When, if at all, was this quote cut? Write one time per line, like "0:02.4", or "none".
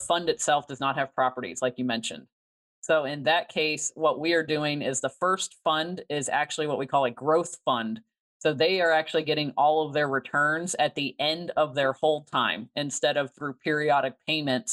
none